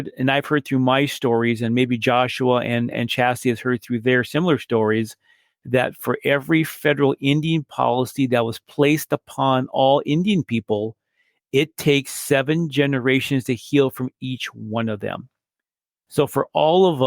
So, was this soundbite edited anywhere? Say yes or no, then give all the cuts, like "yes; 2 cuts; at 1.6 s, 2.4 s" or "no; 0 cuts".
no; 0 cuts